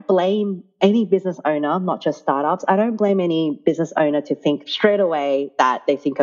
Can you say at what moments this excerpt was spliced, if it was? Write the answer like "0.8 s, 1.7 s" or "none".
4.6 s